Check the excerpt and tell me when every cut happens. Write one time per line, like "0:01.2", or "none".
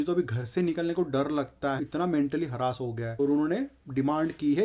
0:01.8
0:03.0

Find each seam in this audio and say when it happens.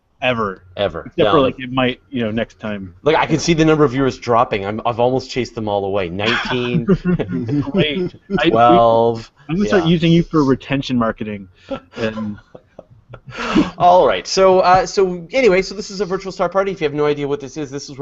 0:15.9

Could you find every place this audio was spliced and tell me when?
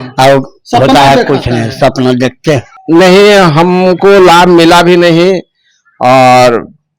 0:02.7

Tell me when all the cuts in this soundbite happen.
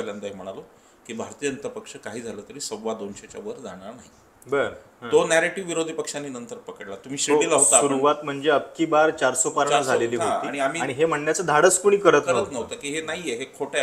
none

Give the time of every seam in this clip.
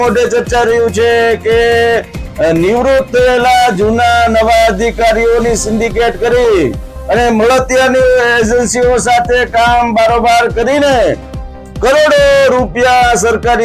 none

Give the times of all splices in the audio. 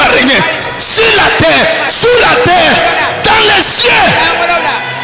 none

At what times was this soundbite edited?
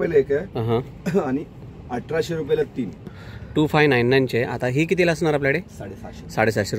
0:03.1

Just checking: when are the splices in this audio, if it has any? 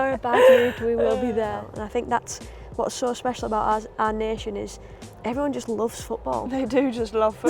0:01.7

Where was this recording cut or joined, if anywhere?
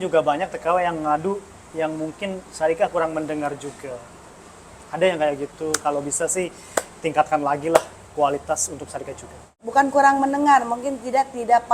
0:09.7

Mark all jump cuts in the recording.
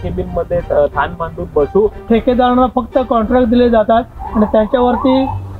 0:02.0

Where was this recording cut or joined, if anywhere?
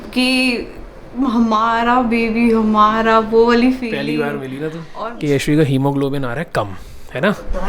0:04.8

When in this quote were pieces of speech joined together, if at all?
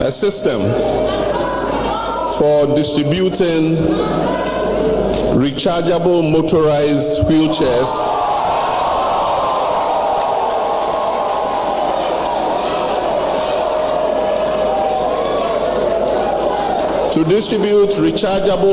none

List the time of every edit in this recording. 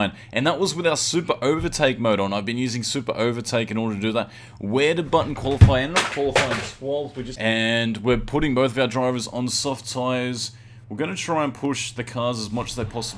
0:07.2

